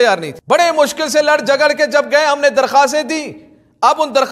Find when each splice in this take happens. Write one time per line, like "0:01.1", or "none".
none